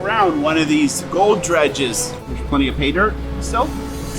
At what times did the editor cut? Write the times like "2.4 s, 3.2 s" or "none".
2.3 s